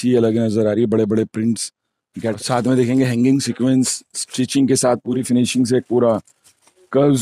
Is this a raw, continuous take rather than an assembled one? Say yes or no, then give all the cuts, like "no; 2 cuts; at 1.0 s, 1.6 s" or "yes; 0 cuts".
no; 2 cuts; at 2.4 s, 5.2 s